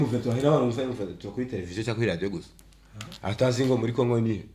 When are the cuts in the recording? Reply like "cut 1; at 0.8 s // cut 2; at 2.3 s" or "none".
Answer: none